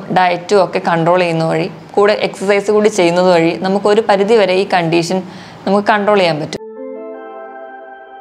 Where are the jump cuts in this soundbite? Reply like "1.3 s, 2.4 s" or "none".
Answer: 6.6 s